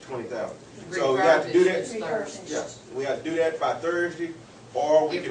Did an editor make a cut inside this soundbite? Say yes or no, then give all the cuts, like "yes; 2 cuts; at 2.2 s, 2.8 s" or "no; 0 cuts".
no; 0 cuts